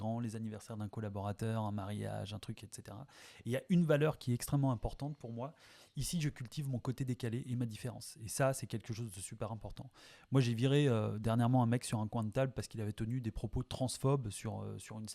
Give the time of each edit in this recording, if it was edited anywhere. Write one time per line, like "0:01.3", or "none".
none